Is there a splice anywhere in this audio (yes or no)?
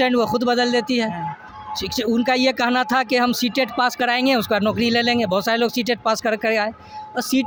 no